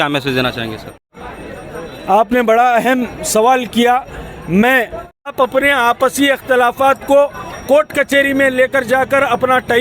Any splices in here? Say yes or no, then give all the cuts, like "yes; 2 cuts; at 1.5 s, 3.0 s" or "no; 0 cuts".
yes; 2 cuts; at 1.2 s, 5.3 s